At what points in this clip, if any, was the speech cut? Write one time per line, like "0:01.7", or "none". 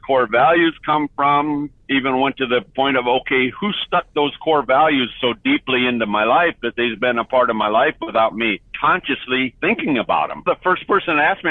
0:01.8
0:10.4